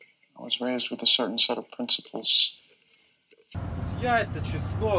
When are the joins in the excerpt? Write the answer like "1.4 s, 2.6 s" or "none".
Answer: 3.5 s